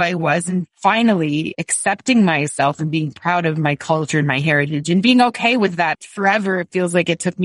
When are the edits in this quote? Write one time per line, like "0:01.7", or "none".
0:06.0